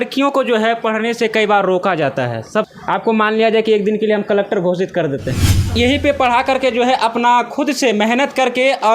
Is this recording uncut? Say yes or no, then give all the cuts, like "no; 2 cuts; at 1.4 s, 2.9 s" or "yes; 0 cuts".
no; 2 cuts; at 2.7 s, 5.7 s